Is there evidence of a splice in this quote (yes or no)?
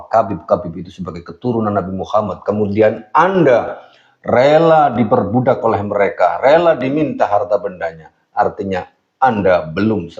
no